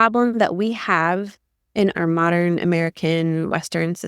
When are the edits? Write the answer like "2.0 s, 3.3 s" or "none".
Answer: 1.9 s